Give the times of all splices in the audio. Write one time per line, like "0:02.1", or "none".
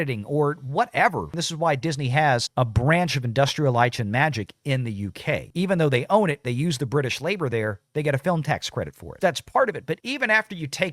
0:05.5
0:09.1
0:10.0